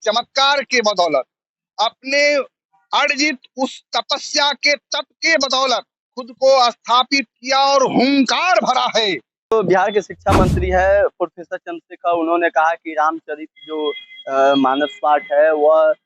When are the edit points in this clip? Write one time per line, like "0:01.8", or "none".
0:09.5